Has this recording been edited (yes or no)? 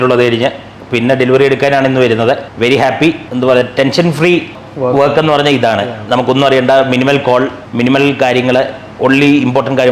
no